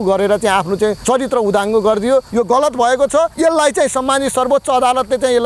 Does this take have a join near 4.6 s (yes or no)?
no